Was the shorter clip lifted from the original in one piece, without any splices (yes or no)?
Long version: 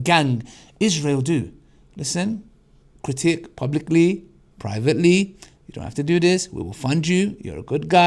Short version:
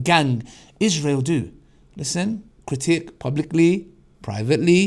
no